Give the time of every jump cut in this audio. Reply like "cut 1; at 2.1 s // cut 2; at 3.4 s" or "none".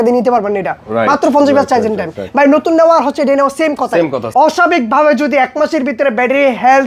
cut 1; at 4.2 s